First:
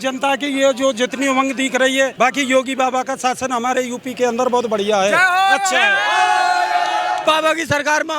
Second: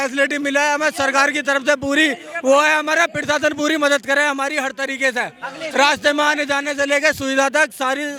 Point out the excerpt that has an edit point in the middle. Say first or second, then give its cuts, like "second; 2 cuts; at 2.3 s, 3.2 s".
first; 2 cuts; at 2.1 s, 7.2 s